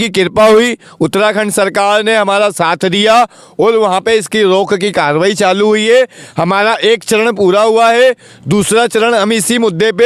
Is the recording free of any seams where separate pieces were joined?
yes; 0 cuts

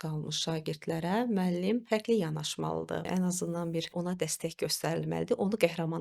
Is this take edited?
yes; 3 cuts; at 1.8 s, 3.1 s, 3.9 s

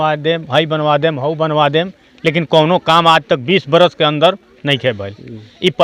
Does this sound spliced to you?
no; 0 cuts

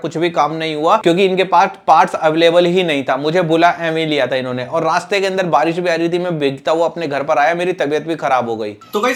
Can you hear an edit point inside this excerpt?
no; 0 cuts

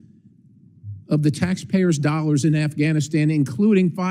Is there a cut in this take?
no; 0 cuts

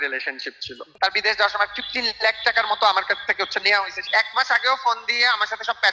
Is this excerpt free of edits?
no; 2 cuts; at 0.9 s, 4.0 s

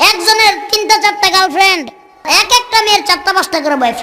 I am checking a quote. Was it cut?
yes; 1 cut; at 2.2 s

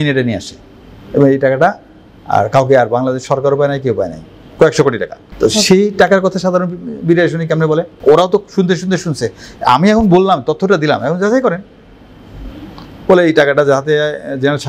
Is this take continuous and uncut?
yes; 0 cuts

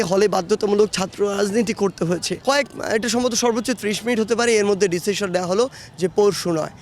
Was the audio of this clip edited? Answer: yes; 1 cut; at 2.3 s

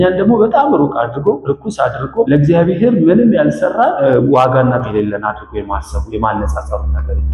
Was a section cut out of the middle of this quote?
yes; 3 cuts; at 2.0 s, 4.0 s, 4.9 s

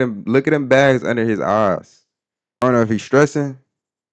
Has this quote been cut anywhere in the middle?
yes; 1 cut; at 2.6 s

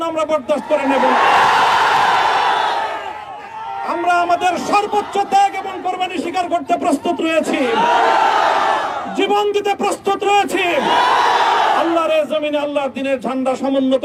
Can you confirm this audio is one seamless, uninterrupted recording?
yes; 0 cuts

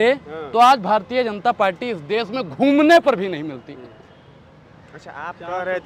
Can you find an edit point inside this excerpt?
no; 0 cuts

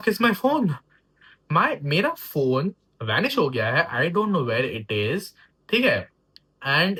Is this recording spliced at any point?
no; 0 cuts

